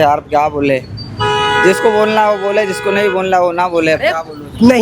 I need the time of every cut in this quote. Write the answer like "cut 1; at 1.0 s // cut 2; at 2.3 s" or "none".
none